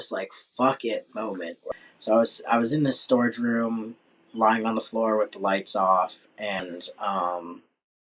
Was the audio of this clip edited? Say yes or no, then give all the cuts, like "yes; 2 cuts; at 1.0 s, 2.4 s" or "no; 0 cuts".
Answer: yes; 2 cuts; at 1.6 s, 6.6 s